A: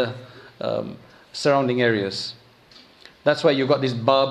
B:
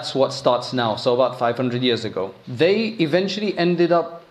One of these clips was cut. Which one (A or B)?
B